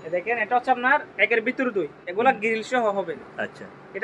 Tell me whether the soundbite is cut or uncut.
uncut